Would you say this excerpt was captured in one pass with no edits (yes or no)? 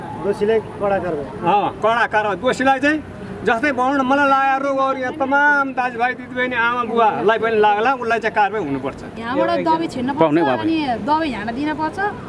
no